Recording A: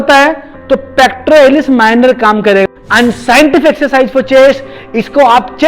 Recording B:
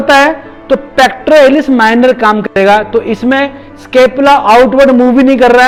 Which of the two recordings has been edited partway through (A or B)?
A